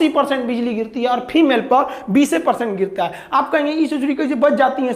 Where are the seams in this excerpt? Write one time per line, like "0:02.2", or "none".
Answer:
none